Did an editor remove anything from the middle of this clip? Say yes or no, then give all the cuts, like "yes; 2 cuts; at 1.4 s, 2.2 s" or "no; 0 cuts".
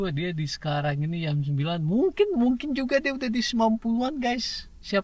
no; 0 cuts